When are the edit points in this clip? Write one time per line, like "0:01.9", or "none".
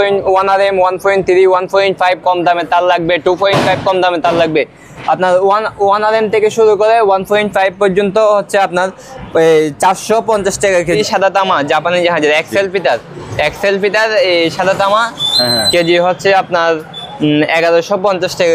0:11.0